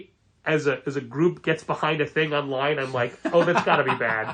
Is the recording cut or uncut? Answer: uncut